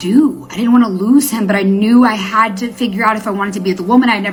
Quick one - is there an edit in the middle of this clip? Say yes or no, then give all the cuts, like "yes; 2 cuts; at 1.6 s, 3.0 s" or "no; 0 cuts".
no; 0 cuts